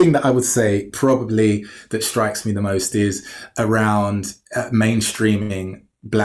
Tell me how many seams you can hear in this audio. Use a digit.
0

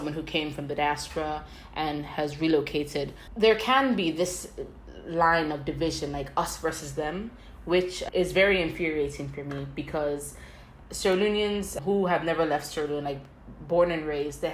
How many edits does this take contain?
1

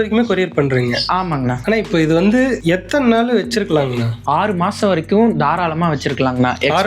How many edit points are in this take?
3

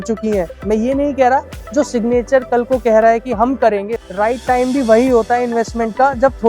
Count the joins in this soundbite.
1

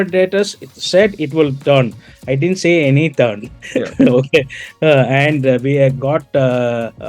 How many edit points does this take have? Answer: 0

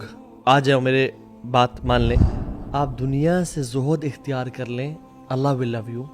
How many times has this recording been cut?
1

